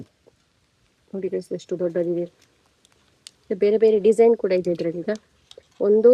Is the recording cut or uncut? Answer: uncut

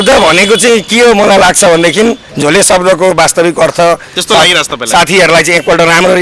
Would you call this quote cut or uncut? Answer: cut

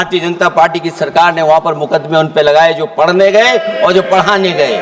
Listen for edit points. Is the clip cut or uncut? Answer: uncut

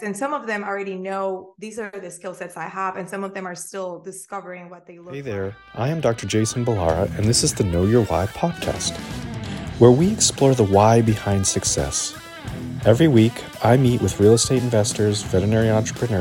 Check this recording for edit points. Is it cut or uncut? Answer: cut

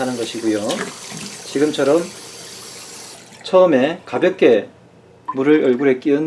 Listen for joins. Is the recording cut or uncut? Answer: cut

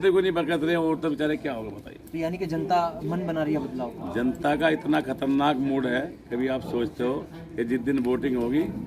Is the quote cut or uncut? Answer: uncut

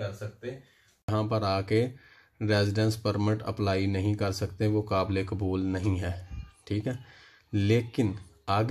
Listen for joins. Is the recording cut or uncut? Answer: cut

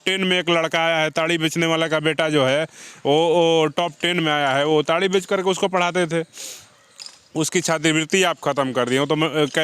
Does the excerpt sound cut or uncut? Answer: uncut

